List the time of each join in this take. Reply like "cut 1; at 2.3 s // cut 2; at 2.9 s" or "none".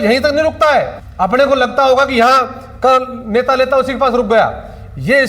cut 1; at 1.0 s